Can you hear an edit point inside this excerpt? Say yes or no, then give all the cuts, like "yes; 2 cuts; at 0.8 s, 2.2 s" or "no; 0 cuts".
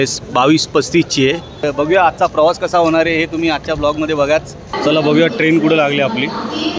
yes; 2 cuts; at 1.7 s, 4.7 s